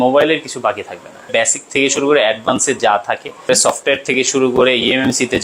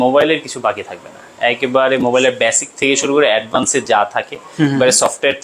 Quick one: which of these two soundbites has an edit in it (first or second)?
first